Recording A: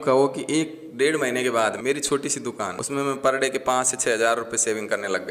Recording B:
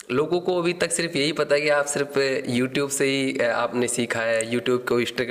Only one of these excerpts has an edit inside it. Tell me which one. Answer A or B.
A